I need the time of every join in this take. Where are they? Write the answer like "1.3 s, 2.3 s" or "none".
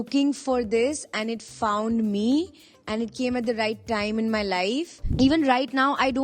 5.0 s